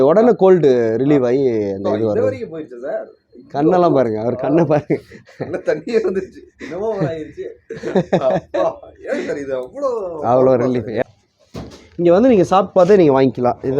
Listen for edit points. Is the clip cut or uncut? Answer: cut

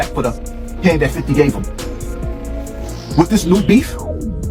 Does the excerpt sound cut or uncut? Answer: uncut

